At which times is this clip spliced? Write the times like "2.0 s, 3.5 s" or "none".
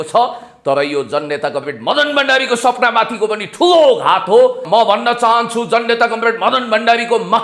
4.7 s

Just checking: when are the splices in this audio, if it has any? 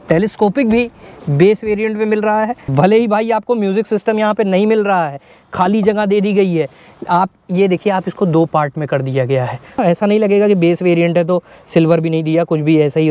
2.6 s, 9.8 s

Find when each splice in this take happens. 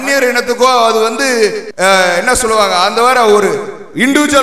1.6 s

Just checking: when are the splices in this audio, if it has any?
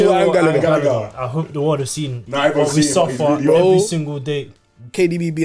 4.5 s

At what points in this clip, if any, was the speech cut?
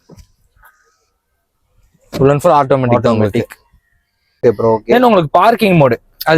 4.4 s

